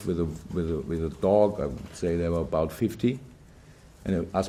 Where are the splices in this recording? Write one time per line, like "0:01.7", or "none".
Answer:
none